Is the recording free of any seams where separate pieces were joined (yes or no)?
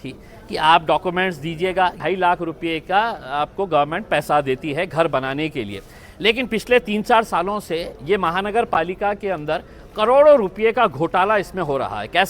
no